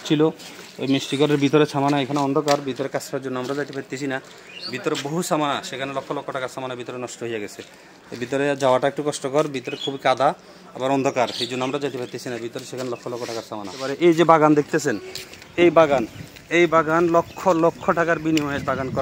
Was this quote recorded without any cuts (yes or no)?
no